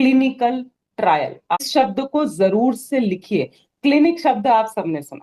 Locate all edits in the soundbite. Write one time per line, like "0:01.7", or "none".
0:01.6